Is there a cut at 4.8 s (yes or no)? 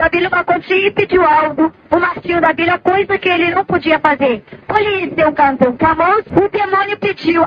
no